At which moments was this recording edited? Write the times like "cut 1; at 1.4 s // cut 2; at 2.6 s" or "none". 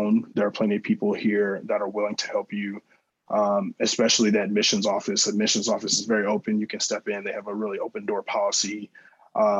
none